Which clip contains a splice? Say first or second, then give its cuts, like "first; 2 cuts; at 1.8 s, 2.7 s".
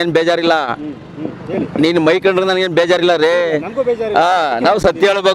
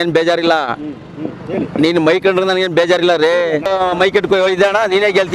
second; 1 cut; at 3.7 s